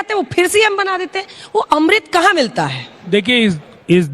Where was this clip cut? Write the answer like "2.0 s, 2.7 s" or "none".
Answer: 2.9 s